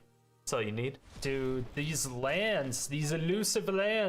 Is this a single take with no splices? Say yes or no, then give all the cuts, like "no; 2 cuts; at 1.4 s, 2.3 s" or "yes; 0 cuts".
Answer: no; 1 cut; at 1.1 s